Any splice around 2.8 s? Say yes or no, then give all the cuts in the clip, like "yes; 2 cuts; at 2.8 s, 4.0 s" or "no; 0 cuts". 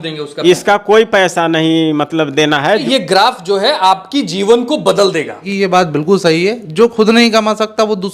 yes; 2 cuts; at 2.8 s, 5.5 s